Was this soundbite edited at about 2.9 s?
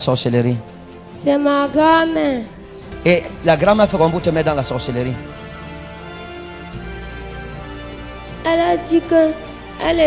yes; 1 cut; at 2.9 s

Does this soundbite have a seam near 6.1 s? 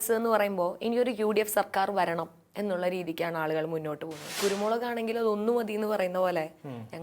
no; 1 cut; at 4.4 s

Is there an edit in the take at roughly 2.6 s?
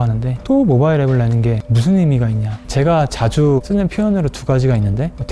yes; 2 cuts; at 1.7 s, 2.6 s

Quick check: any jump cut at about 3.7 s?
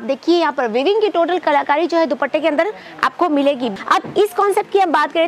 yes; 1 cut; at 3.7 s

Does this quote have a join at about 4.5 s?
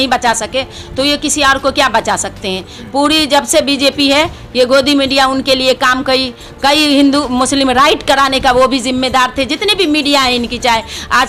no; 0 cuts

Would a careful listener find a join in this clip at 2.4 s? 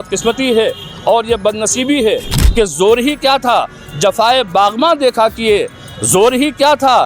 yes; 1 cut; at 2.4 s

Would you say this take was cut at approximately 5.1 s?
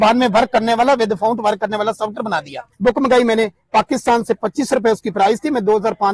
no; 1 cut; at 2.6 s

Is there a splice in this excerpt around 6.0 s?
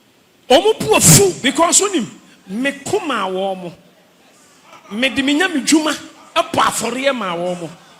no; 1 cut; at 1.4 s

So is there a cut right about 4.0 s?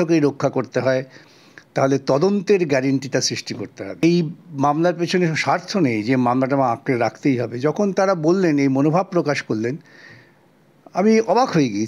yes; 1 cut; at 4.0 s

